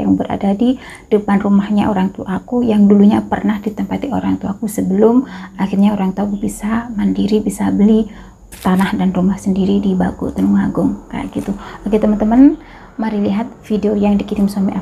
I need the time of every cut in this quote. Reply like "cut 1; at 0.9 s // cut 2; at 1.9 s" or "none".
none